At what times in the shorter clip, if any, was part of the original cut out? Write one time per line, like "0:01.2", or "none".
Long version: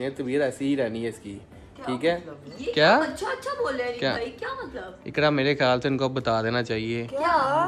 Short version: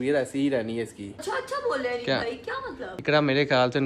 0:01.2
0:02.9